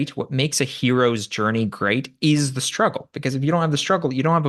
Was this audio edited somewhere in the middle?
no; 0 cuts

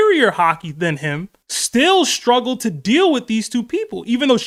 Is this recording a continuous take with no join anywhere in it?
yes; 0 cuts

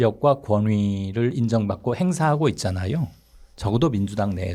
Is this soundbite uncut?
yes; 0 cuts

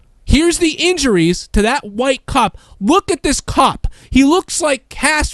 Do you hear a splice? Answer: yes; 1 cut; at 3.3 s

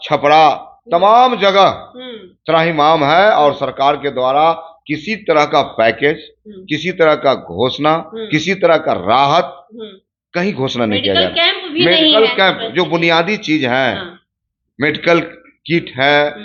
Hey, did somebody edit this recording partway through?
no; 0 cuts

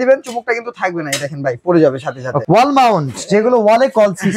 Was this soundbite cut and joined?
yes; 1 cut; at 2.4 s

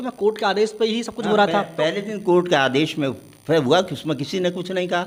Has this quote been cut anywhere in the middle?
no; 0 cuts

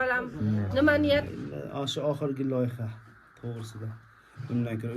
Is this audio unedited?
no; 1 cut; at 1.3 s

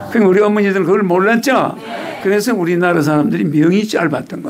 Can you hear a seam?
no; 0 cuts

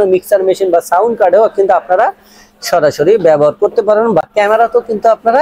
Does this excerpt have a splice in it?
no; 0 cuts

